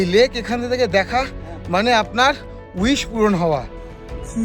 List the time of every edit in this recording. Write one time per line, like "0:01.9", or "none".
none